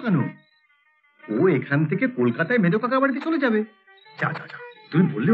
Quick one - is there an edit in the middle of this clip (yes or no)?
no